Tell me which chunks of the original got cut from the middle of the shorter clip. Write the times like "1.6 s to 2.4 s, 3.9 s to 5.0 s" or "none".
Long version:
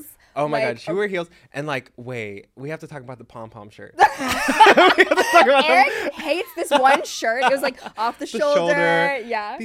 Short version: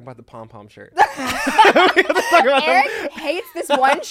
none